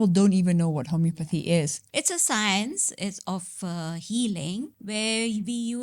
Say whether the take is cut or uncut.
cut